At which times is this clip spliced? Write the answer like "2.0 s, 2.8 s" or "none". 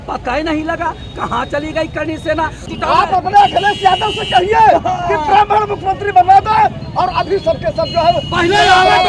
2.6 s